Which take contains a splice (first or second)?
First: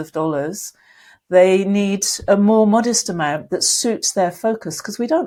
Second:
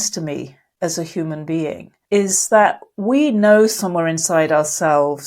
second